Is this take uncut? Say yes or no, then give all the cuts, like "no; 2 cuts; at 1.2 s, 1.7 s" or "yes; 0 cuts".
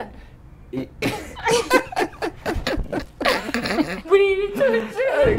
no; 1 cut; at 4.0 s